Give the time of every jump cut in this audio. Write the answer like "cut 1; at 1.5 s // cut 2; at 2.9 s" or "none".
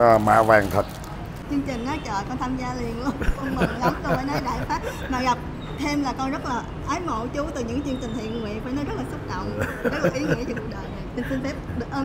cut 1; at 1.4 s